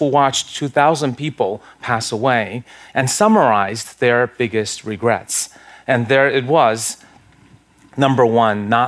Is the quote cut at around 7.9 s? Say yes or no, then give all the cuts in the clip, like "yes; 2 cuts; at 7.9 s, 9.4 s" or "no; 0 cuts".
no; 0 cuts